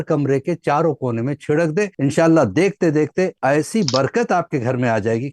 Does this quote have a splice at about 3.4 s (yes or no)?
yes